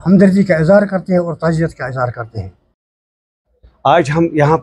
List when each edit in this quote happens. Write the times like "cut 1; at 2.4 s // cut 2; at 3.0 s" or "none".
cut 1; at 3.1 s